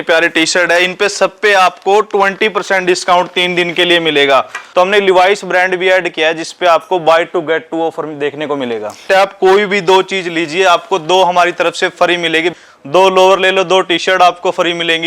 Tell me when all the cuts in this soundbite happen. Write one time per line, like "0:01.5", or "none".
0:04.6
0:09.1
0:12.5